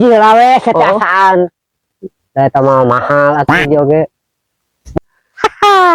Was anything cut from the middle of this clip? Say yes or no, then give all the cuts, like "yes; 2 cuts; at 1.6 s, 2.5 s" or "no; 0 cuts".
yes; 1 cut; at 4.9 s